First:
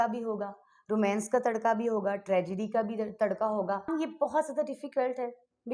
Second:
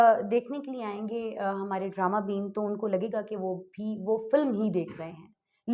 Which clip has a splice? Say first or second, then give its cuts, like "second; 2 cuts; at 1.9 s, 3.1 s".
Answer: first; 1 cut; at 3.9 s